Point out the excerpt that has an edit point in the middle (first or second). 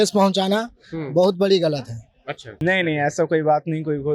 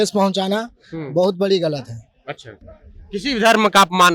first